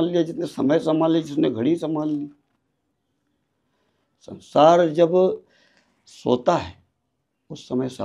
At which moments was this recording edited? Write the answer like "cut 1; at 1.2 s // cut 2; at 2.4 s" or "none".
none